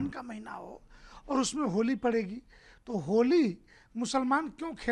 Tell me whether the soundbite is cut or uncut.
uncut